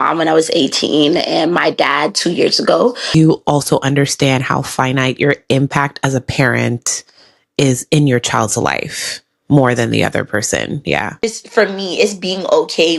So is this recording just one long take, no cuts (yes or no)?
no